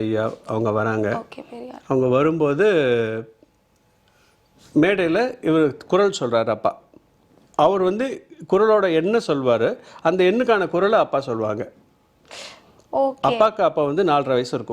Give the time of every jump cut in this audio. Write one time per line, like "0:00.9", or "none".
none